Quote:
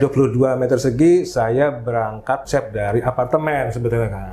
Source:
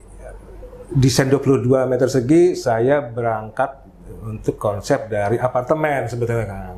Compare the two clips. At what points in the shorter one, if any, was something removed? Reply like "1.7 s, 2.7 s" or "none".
2.4 s